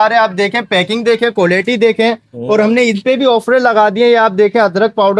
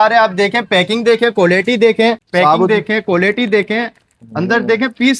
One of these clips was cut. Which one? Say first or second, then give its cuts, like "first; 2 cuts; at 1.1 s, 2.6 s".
second; 1 cut; at 2.2 s